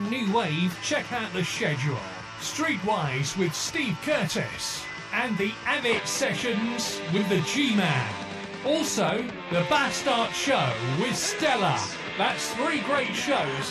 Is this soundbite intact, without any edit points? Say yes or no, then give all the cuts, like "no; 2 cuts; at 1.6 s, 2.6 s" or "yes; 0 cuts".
yes; 0 cuts